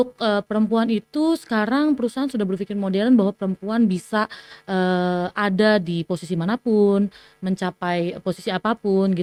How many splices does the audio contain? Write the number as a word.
zero